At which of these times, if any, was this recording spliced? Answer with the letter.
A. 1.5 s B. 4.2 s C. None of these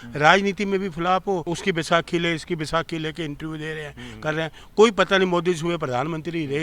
A